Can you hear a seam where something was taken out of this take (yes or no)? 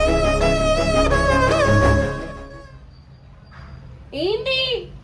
no